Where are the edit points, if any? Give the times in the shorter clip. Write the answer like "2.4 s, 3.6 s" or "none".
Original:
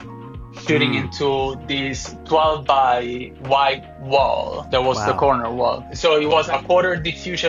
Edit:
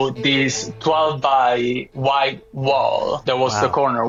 none